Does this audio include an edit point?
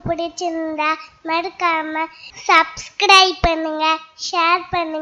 no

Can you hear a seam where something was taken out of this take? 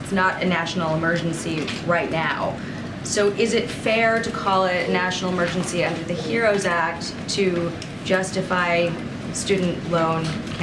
no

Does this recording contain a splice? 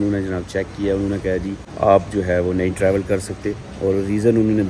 no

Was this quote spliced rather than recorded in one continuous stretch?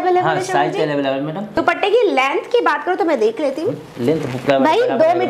yes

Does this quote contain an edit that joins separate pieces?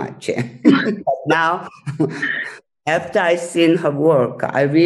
no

